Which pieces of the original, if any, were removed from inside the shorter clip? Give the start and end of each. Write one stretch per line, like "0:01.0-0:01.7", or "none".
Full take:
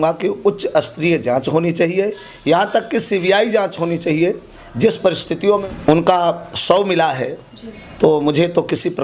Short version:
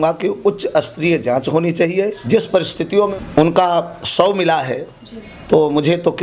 0:02.2-0:04.7